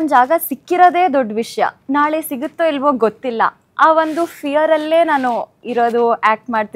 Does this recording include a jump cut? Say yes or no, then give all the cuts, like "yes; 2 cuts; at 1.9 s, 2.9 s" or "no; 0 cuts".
no; 0 cuts